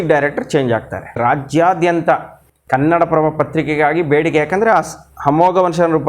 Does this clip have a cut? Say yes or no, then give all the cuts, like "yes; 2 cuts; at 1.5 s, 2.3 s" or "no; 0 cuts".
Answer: yes; 1 cut; at 1.2 s